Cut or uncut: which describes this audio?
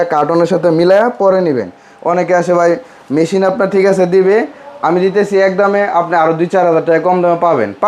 uncut